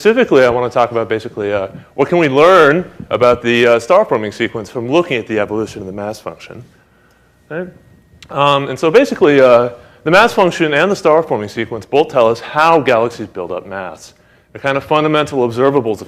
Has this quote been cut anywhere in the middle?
no; 0 cuts

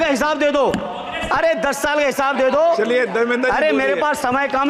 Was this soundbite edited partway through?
no; 0 cuts

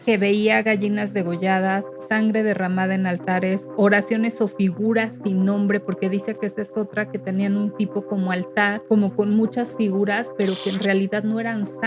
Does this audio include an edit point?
yes; 1 cut; at 8.8 s

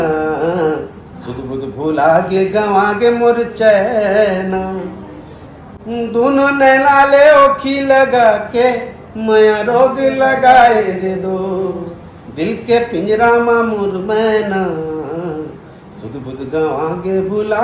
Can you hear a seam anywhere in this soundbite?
no; 0 cuts

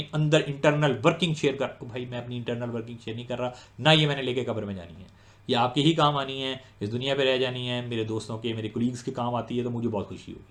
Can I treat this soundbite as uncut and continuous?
yes; 0 cuts

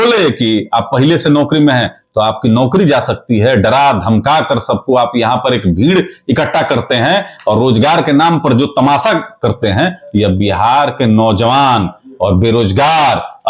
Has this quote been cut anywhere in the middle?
no; 0 cuts

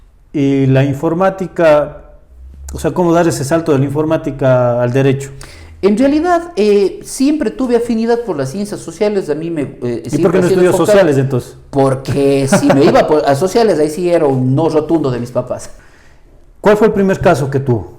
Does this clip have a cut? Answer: yes; 1 cut; at 15.7 s

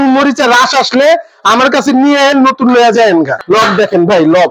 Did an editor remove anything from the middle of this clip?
yes; 1 cut; at 3.4 s

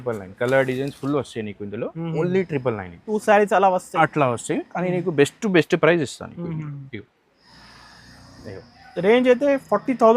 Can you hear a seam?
yes; 1 cut; at 3.1 s

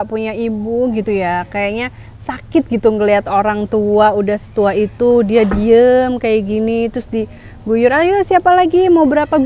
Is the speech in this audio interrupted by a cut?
no; 0 cuts

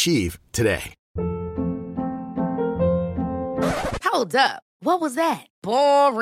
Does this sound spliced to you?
yes; 1 cut; at 1.0 s

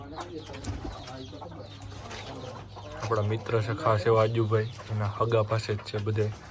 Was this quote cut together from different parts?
no; 0 cuts

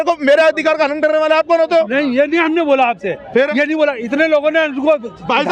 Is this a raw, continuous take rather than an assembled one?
yes; 0 cuts

